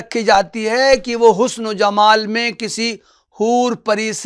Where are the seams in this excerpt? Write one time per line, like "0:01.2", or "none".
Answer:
none